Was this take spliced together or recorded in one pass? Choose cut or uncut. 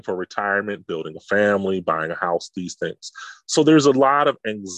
uncut